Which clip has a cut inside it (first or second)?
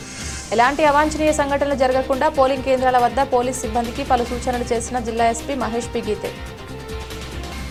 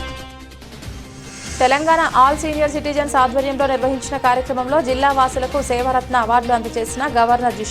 second